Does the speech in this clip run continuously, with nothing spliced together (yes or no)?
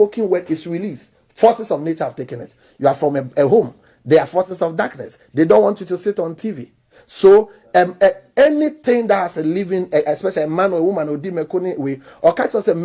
yes